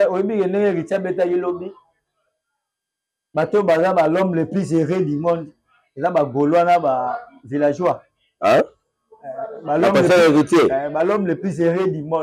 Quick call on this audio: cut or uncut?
uncut